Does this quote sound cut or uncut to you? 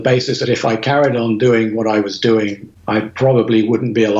cut